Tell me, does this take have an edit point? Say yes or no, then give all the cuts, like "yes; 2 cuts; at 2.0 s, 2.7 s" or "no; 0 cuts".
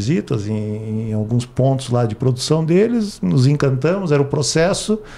no; 0 cuts